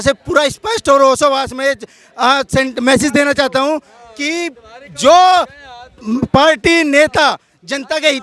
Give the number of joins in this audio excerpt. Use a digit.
0